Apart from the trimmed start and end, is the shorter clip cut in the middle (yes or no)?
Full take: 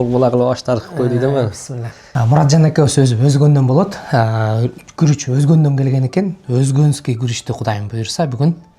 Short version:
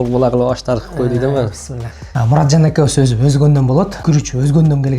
yes